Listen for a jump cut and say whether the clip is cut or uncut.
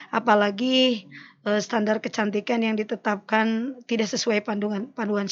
uncut